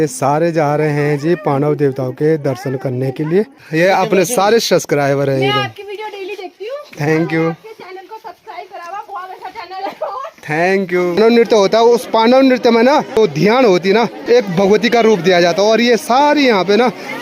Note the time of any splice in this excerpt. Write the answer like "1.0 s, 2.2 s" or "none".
3.6 s, 11.2 s, 14.2 s